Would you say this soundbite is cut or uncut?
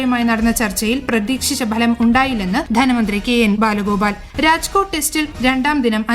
cut